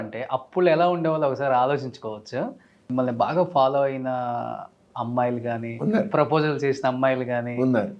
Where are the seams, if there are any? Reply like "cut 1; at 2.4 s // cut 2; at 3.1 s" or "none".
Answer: cut 1; at 2.8 s